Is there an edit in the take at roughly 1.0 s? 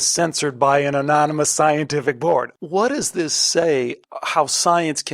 no; 2 cuts; at 2.5 s, 3.9 s

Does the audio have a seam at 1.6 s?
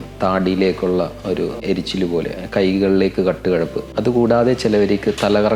yes; 2 cuts; at 1.6 s, 3.8 s

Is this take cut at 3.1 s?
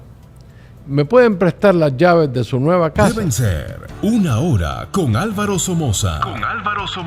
yes; 1 cut; at 3.1 s

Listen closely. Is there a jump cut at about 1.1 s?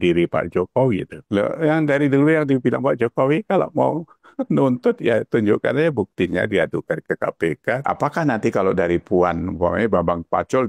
yes; 2 cuts; at 1.1 s, 7.8 s

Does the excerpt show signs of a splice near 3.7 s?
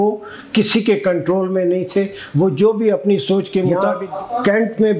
yes; 1 cut; at 3.7 s

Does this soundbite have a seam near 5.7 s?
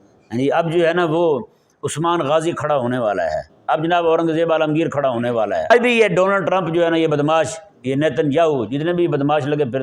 yes; 1 cut; at 5.7 s

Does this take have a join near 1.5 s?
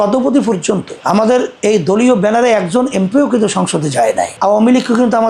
no; 1 cut; at 4.3 s

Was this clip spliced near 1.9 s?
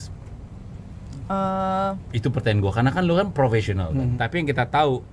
no; 1 cut; at 4.1 s

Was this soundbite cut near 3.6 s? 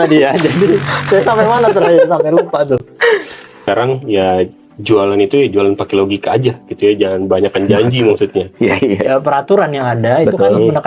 yes; 2 cuts; at 3.6 s, 9.1 s

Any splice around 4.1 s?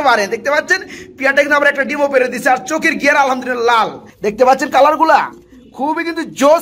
yes; 1 cut; at 4.1 s

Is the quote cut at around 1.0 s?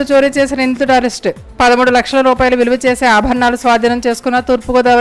no; 0 cuts

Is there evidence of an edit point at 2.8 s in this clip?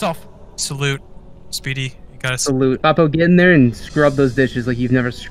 yes; 1 cut; at 2.8 s

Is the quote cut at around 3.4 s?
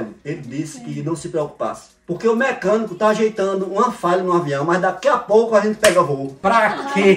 no; 2 cuts; at 1.9 s, 6.3 s

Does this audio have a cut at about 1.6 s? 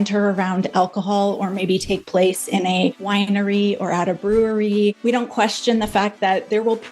no; 2 cuts; at 3.0 s, 5.0 s

